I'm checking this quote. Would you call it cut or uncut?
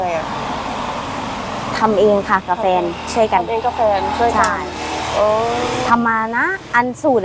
uncut